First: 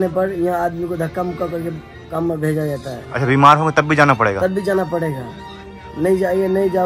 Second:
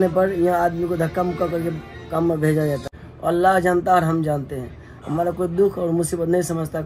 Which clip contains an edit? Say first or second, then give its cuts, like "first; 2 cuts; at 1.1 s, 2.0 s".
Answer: second; 1 cut; at 2.9 s